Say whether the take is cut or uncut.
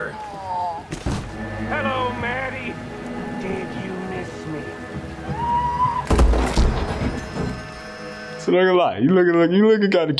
cut